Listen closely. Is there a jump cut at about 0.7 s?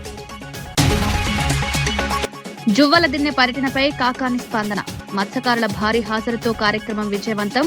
yes; 2 cuts; at 0.7 s, 2.2 s

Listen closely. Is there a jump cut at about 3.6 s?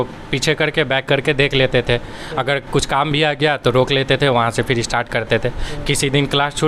no; 0 cuts

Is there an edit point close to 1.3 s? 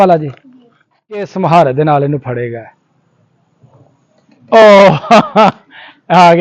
yes; 1 cut; at 1.3 s

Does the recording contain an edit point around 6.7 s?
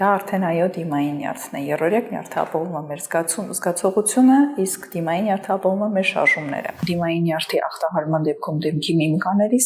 yes; 1 cut; at 6.7 s

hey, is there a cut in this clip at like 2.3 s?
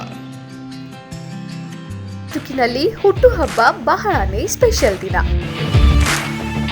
yes; 1 cut; at 2.3 s

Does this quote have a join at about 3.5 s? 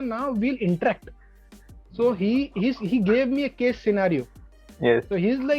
no; 0 cuts

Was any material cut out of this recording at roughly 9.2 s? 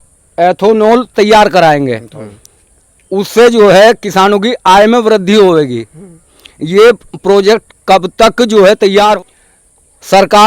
yes; 1 cut; at 9.2 s

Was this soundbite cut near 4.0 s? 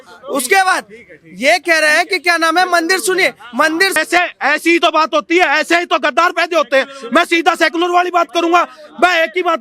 yes; 1 cut; at 4.0 s

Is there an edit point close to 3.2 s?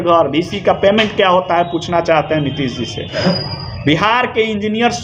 yes; 1 cut; at 3.2 s

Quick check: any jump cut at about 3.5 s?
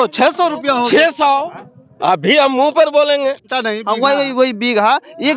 yes; 1 cut; at 3.5 s

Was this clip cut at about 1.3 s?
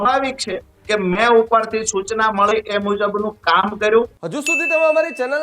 no; 1 cut; at 4.1 s

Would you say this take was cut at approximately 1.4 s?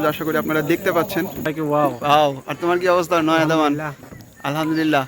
yes; 1 cut; at 1.4 s

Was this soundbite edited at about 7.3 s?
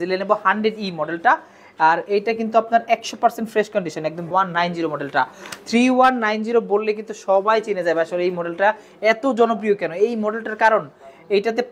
no; 1 cut; at 4.2 s

